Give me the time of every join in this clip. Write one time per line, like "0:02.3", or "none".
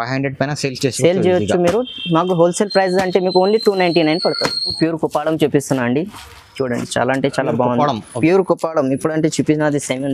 0:04.7